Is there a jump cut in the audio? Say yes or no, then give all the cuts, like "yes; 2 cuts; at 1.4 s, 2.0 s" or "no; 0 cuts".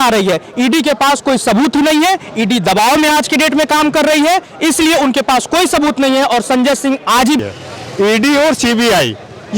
yes; 1 cut; at 7.4 s